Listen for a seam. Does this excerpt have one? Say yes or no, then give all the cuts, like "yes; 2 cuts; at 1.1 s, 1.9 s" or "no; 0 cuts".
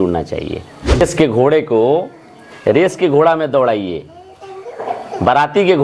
yes; 1 cut; at 1.0 s